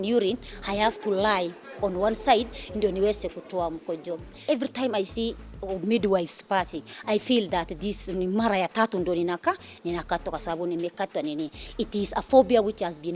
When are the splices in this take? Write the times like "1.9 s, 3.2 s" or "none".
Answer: 4.3 s